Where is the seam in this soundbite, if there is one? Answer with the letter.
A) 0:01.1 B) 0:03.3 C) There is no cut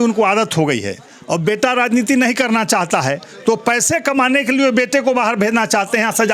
C